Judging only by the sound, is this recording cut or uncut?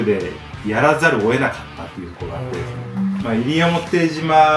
cut